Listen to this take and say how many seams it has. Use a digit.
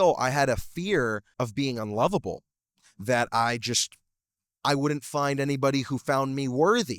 1